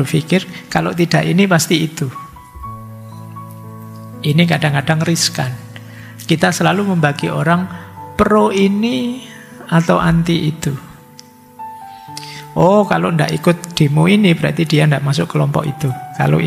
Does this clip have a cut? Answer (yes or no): yes